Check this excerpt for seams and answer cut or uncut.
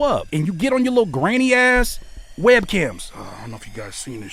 uncut